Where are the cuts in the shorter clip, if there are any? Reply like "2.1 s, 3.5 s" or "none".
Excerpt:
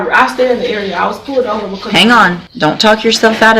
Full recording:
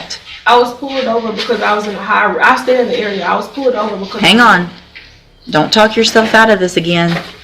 2.4 s